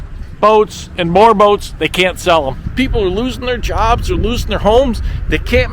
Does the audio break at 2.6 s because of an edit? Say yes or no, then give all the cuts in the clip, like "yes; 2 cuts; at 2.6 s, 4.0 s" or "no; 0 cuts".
yes; 1 cut; at 2.6 s